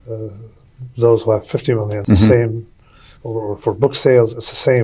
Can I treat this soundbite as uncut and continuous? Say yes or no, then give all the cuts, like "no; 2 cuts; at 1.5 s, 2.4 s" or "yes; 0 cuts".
no; 1 cut; at 1.9 s